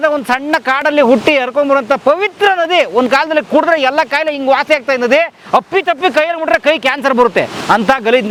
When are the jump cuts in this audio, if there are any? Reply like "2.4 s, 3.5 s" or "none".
none